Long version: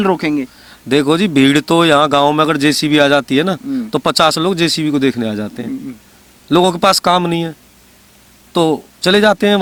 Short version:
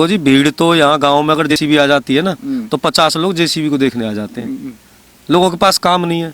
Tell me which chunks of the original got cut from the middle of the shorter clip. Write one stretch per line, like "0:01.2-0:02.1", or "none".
0:02.6-0:02.7